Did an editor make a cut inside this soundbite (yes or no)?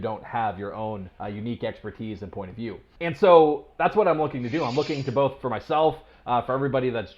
yes